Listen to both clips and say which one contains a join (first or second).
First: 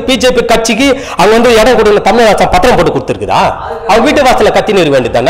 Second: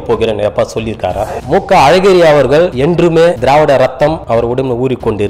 second